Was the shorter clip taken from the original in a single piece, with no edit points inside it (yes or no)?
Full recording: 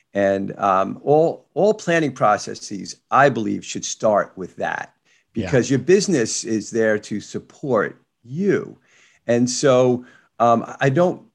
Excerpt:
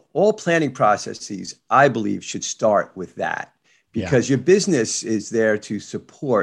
yes